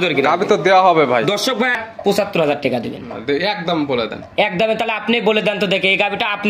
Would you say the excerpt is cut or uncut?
cut